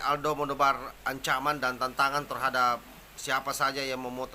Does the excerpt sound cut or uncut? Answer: uncut